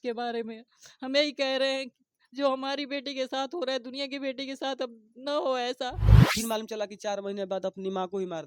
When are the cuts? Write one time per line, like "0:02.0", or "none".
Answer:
0:06.0